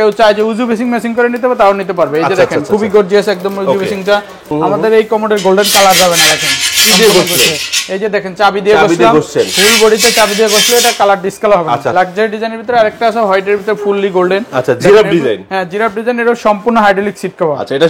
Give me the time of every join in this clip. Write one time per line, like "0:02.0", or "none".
0:04.4
0:11.9